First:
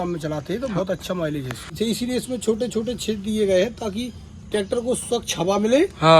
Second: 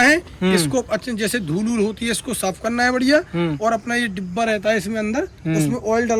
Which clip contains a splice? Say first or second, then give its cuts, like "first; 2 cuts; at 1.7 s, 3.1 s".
first; 1 cut; at 1.7 s